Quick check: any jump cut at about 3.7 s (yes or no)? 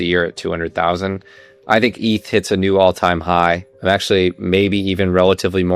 yes